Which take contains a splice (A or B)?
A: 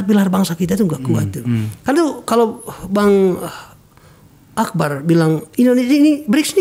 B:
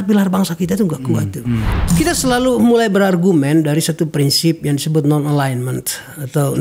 B